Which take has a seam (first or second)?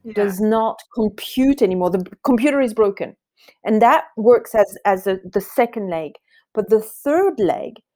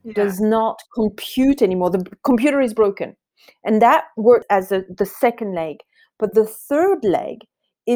second